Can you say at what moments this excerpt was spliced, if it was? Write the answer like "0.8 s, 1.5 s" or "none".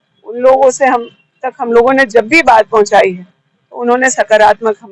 none